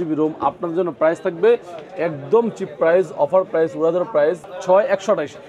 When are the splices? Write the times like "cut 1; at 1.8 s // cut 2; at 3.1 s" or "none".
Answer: cut 1; at 4.5 s